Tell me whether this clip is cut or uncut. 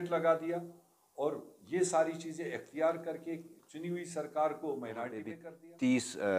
cut